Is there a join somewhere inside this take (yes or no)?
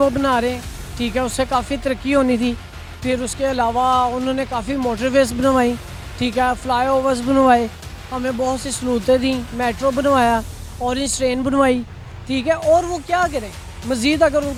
no